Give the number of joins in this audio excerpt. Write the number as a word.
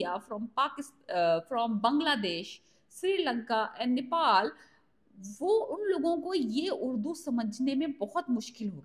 zero